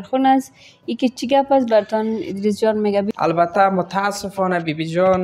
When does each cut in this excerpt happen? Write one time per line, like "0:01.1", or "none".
0:03.1